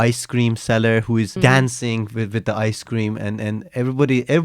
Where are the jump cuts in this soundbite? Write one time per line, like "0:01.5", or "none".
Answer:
0:01.3